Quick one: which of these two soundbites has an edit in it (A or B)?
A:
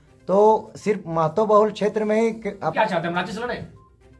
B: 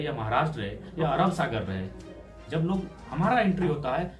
A